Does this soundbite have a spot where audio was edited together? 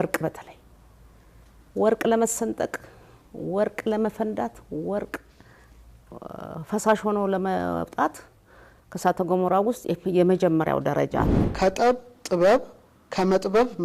yes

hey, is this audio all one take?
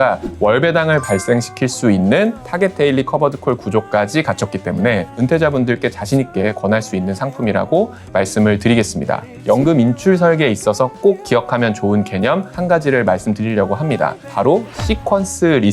no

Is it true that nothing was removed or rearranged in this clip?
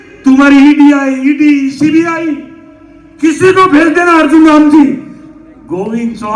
yes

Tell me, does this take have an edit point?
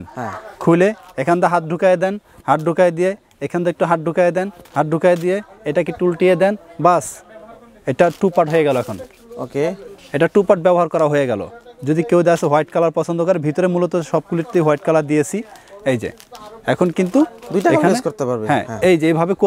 no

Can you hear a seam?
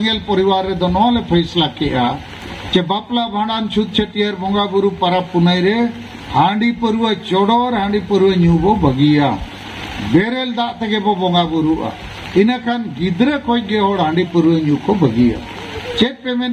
no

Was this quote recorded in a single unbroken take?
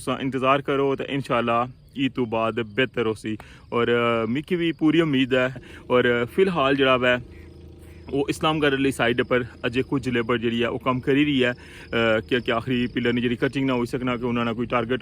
no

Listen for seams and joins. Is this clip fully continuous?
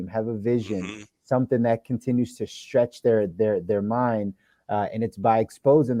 yes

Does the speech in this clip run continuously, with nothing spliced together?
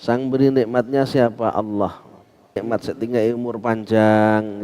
no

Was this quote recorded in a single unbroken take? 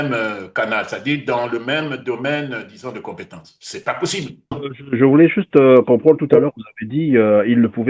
no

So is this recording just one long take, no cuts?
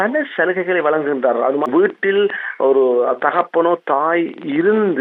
no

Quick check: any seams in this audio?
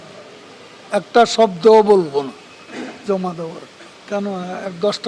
yes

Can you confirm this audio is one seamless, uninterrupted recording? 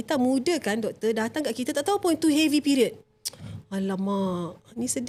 yes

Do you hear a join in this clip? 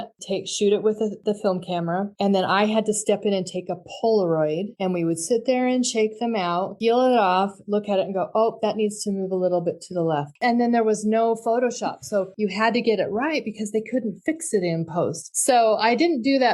yes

